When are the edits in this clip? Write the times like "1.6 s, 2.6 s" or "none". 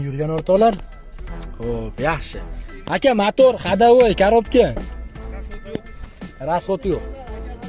none